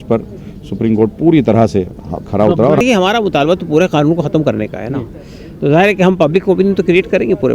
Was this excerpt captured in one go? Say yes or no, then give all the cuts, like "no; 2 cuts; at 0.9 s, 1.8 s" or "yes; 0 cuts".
no; 1 cut; at 2.8 s